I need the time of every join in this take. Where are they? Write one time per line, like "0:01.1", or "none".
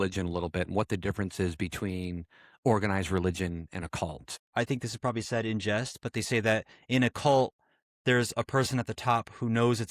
0:04.4